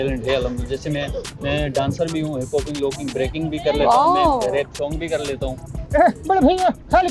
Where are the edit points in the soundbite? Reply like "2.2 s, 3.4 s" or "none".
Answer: 1.3 s, 5.8 s

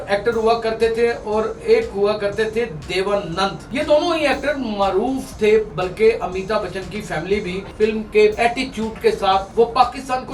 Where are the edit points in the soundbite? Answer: 3.6 s, 7.7 s, 8.3 s, 9.5 s

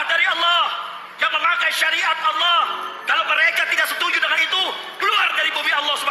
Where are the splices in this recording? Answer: none

